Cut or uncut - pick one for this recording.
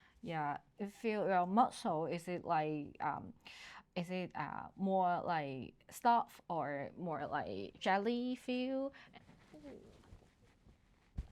cut